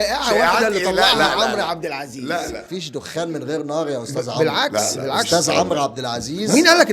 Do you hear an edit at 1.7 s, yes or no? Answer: no